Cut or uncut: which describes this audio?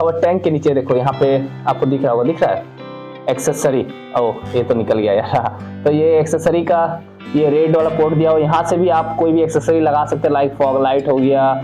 uncut